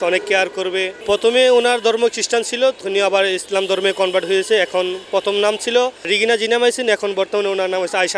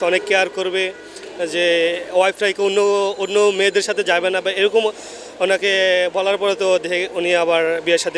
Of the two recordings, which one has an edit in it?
first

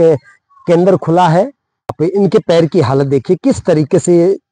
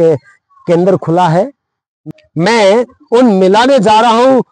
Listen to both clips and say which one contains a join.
first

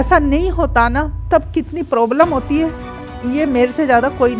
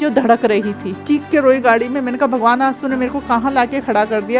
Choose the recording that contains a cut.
second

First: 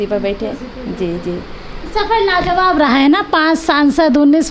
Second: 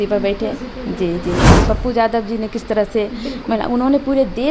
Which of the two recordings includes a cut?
second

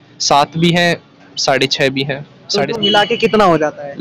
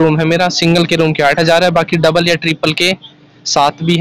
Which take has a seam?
first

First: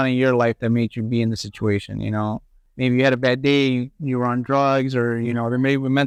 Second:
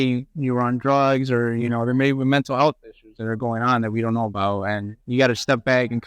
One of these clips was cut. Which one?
second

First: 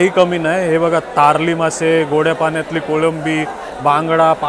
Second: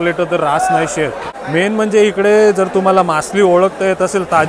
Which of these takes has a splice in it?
second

